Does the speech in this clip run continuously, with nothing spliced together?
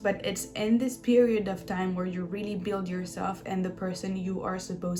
yes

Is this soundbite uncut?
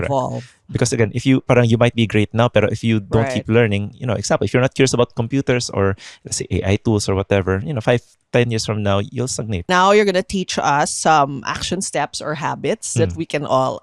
no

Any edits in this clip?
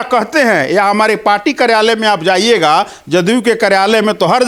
no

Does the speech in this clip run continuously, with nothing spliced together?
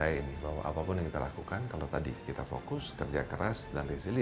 yes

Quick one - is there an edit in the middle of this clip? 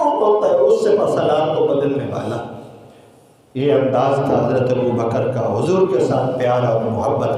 no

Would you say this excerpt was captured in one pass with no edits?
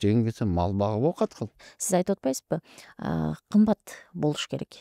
no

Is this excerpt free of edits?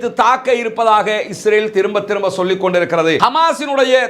no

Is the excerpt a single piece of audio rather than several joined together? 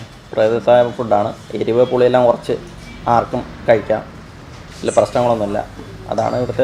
yes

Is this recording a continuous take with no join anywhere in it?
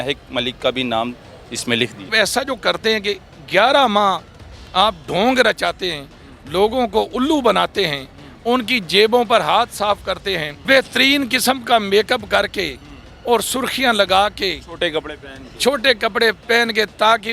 no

